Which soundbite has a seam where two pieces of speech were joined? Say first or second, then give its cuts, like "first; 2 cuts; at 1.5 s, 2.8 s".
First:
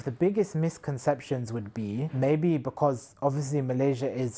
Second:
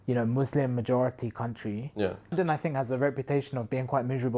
second; 1 cut; at 2.3 s